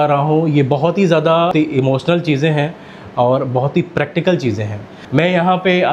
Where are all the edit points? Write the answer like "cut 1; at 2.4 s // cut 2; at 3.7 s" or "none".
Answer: cut 1; at 1.5 s // cut 2; at 4.9 s